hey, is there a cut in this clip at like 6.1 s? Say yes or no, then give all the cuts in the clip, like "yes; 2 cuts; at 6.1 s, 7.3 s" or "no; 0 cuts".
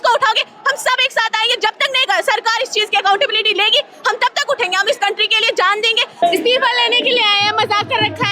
yes; 1 cut; at 6.1 s